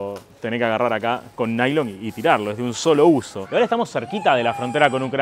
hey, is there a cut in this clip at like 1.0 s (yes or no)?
no